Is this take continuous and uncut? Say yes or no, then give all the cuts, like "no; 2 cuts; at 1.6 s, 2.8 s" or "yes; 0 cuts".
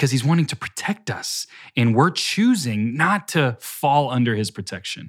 yes; 0 cuts